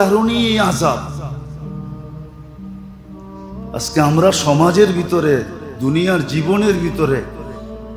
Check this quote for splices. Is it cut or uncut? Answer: uncut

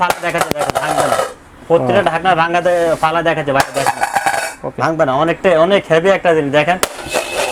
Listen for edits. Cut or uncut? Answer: uncut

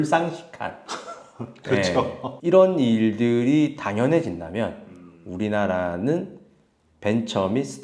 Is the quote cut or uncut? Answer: uncut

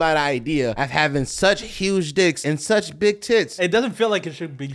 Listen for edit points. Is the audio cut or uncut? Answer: cut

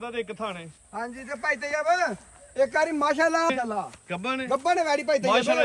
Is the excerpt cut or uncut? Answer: cut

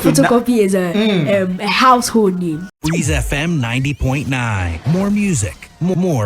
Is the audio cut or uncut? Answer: cut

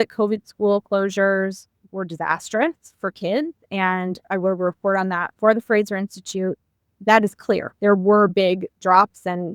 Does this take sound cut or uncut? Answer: cut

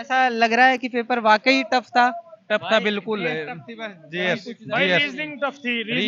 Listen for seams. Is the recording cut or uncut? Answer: uncut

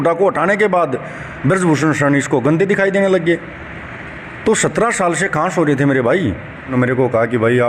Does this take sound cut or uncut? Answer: cut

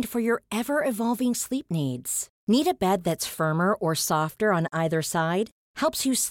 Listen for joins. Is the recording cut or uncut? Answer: uncut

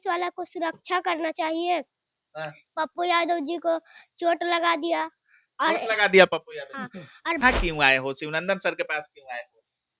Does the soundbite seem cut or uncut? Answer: cut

